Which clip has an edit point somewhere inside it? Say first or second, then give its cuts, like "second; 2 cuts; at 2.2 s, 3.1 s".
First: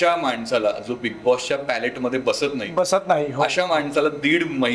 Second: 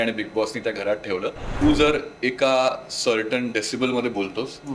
second; 1 cut; at 1.6 s